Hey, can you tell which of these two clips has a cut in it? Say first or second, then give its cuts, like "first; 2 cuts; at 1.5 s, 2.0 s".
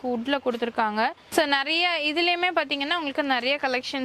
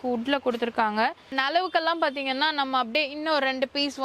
second; 1 cut; at 1.3 s